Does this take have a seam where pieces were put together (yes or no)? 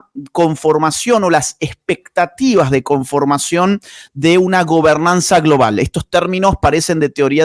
no